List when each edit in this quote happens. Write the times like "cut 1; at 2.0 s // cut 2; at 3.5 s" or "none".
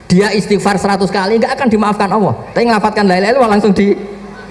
none